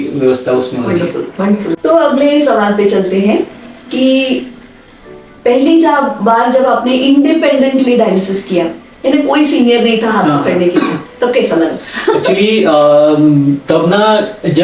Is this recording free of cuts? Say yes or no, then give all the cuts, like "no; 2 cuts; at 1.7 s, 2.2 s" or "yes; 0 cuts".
yes; 0 cuts